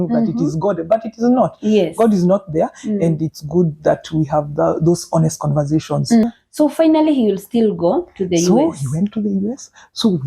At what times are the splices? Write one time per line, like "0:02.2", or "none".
0:06.2